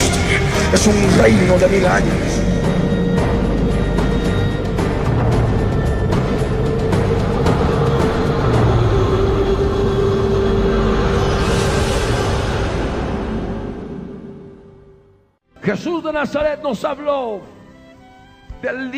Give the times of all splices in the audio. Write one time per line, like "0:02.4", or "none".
none